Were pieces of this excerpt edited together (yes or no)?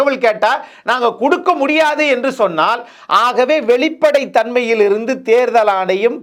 no